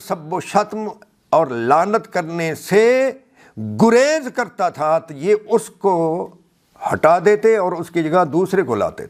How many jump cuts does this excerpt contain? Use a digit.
0